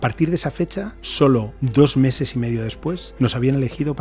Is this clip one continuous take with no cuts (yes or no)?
no